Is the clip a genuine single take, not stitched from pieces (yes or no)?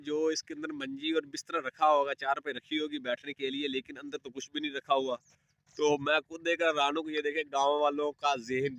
yes